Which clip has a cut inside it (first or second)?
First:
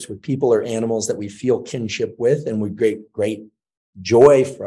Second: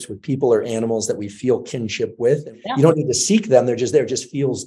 second